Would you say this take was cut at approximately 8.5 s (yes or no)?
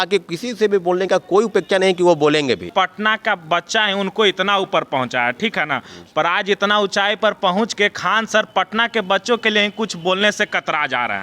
no